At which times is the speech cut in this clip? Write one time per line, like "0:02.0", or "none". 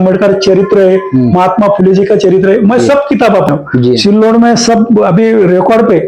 0:04.0